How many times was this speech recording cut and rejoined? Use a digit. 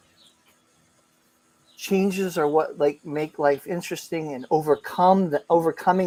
0